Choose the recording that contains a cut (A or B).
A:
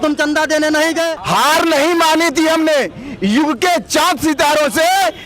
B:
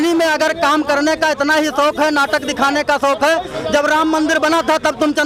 A